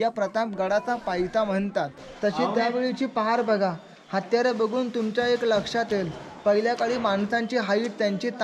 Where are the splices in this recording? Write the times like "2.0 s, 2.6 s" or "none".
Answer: 2.0 s